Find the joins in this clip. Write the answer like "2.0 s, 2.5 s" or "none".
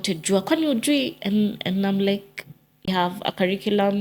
2.9 s